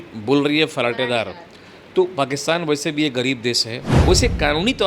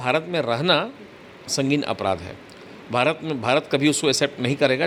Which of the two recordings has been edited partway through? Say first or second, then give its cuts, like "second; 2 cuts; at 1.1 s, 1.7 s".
first; 1 cut; at 3.8 s